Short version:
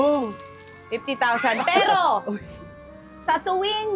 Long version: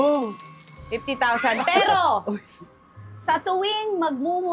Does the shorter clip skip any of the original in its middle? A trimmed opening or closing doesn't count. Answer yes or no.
no